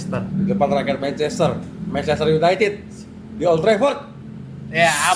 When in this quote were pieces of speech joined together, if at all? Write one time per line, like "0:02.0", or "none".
none